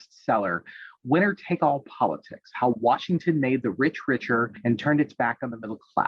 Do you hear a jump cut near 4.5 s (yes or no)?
yes